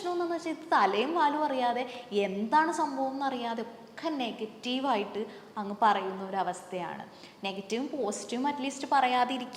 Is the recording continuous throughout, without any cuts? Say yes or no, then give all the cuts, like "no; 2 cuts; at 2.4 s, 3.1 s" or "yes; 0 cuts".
yes; 0 cuts